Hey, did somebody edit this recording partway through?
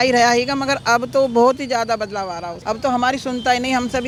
no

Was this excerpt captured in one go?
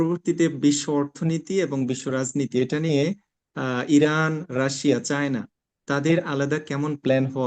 yes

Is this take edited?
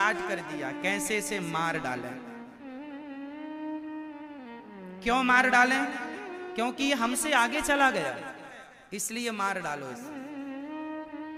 no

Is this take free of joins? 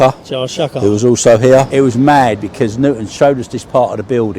no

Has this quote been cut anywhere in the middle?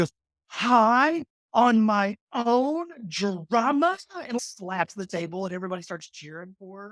no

